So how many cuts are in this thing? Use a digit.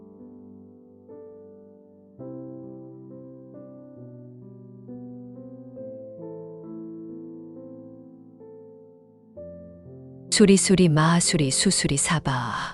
0